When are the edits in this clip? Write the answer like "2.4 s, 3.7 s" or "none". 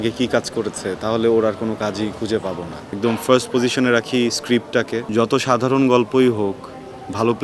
2.8 s, 5.1 s